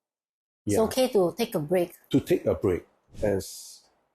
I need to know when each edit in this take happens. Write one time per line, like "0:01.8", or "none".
0:03.1